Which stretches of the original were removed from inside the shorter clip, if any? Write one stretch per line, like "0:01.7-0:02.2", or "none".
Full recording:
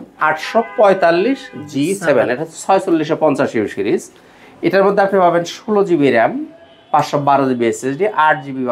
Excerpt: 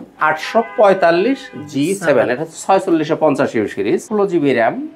0:04.1-0:05.6